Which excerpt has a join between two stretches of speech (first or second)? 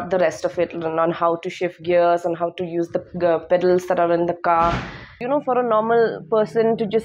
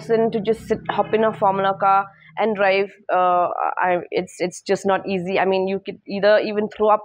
first